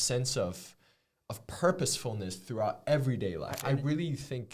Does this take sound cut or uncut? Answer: cut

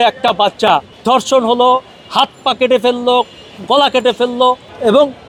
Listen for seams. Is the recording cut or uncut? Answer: uncut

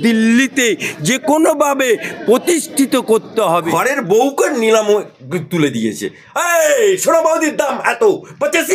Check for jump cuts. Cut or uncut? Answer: cut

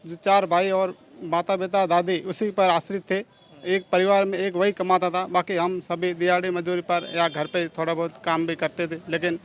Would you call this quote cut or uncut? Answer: uncut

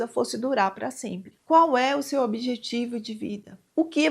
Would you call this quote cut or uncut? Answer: cut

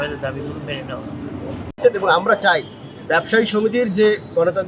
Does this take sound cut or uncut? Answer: cut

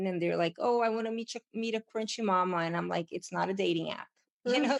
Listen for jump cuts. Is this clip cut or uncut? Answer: uncut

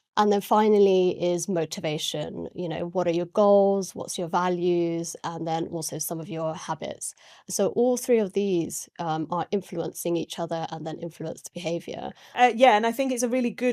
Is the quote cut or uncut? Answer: cut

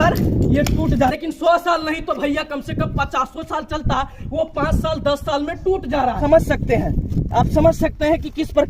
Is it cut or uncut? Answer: cut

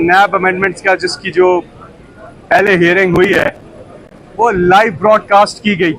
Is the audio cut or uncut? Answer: uncut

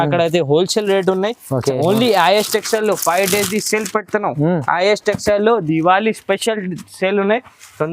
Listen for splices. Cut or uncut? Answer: cut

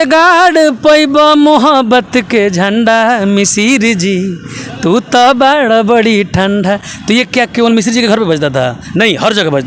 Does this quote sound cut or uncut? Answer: uncut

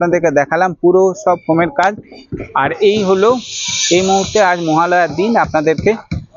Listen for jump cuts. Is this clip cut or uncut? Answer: uncut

